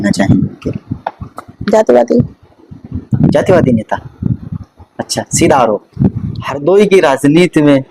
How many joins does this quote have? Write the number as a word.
one